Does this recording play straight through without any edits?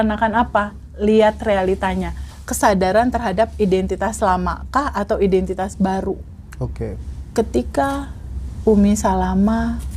yes; 0 cuts

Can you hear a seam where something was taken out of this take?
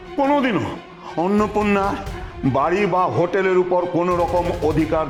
no; 0 cuts

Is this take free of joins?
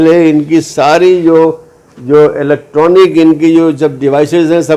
yes; 0 cuts

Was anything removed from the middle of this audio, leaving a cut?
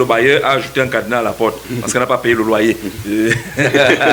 no; 0 cuts

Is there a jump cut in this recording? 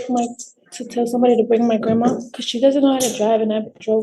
yes; 1 cut; at 2.3 s

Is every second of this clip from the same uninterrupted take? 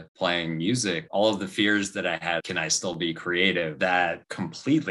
no; 3 cuts; at 1.0 s, 2.4 s, 3.8 s

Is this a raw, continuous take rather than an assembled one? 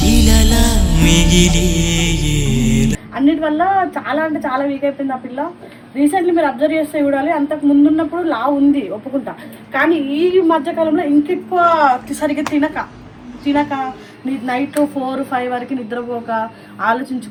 yes; 0 cuts

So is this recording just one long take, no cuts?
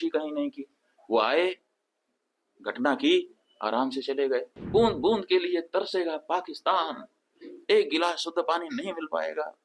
no; 1 cut; at 4.6 s

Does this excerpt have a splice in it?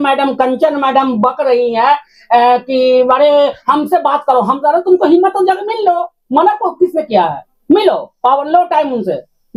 no; 0 cuts

